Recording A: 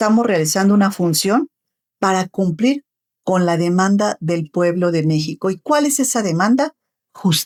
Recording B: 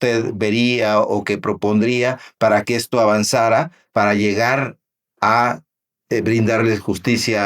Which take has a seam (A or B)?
B